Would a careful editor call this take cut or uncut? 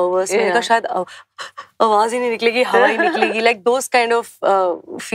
uncut